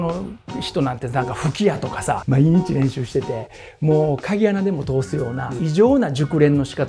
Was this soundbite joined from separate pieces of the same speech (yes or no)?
yes